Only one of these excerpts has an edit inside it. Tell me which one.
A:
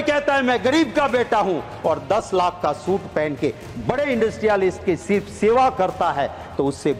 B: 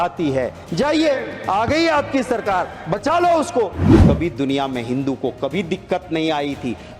B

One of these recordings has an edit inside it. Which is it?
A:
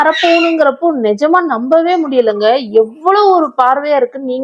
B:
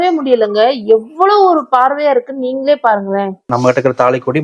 B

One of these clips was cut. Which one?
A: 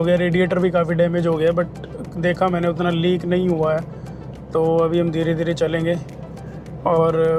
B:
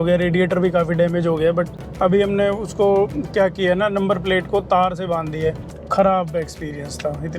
B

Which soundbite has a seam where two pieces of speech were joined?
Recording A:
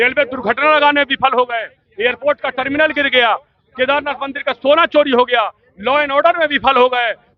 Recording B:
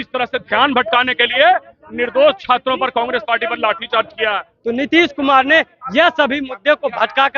B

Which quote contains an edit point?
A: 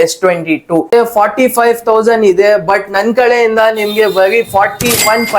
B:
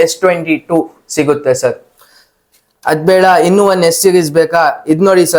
A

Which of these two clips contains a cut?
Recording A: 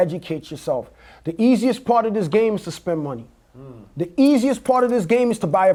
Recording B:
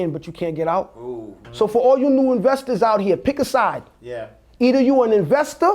B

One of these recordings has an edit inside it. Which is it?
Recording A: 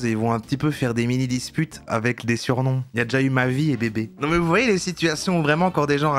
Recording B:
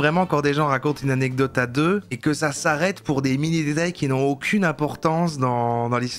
A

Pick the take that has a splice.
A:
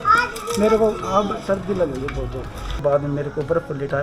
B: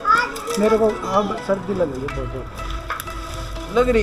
A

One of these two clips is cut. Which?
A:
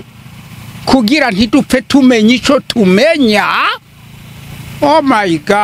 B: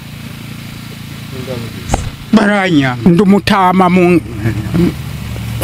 B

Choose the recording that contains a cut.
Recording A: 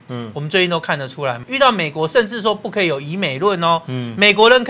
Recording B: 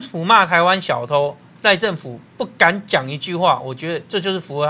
A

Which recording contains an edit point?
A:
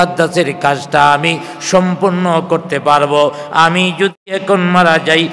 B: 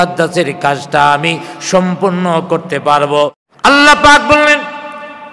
B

